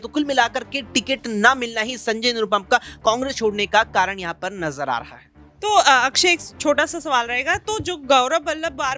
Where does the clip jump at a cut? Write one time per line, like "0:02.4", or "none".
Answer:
none